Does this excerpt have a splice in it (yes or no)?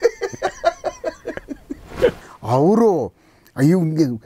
yes